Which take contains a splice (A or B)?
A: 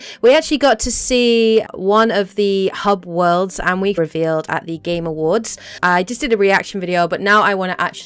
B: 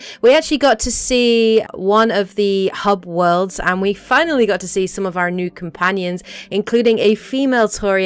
B